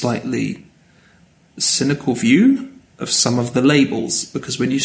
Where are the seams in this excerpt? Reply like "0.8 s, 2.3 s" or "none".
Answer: 1.2 s